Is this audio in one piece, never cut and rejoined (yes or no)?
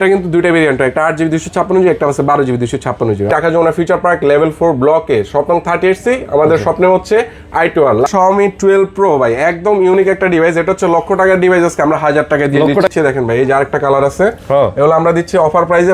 no